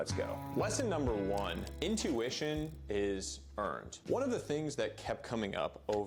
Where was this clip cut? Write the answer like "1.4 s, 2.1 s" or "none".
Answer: none